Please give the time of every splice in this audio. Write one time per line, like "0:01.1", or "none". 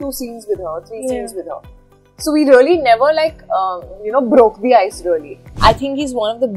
0:05.4